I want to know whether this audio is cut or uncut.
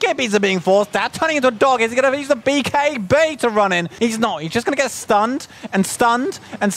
cut